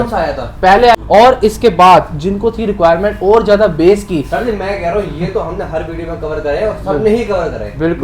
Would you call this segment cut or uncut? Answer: cut